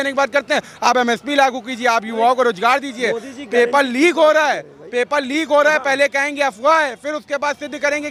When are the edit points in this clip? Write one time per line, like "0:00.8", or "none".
none